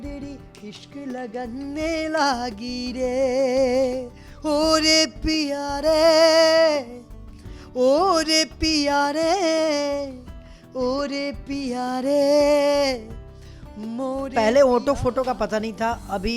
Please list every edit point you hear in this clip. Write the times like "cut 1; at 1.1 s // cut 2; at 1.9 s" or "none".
cut 1; at 14.3 s